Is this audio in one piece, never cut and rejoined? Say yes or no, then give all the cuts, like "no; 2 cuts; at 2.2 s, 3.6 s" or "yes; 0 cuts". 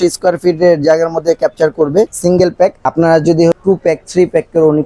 no; 2 cuts; at 2.3 s, 3.6 s